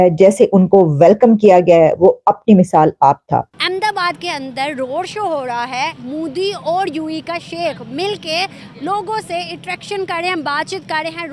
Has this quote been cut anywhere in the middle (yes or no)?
yes